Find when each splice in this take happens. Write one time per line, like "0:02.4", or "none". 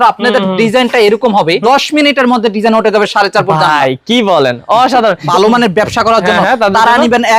0:01.6
0:05.2

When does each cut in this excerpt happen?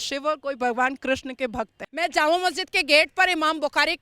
0:01.8

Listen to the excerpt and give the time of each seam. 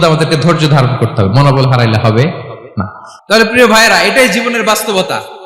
0:02.6

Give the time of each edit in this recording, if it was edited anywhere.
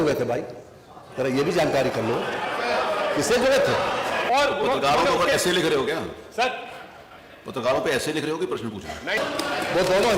0:04.2
0:09.2

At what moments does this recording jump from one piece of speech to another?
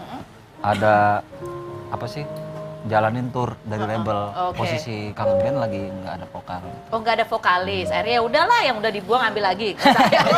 0:01.6

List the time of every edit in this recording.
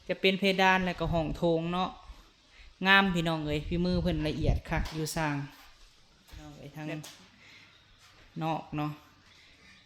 0:06.6

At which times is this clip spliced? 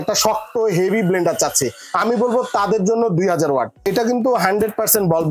0:03.9

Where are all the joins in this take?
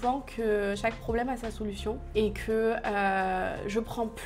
none

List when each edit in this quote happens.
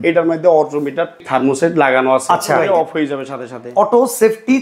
0:01.2
0:02.6

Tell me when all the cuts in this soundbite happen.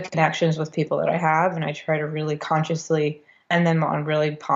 none

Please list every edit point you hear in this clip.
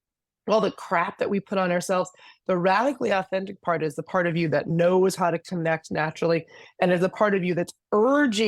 0:04.7

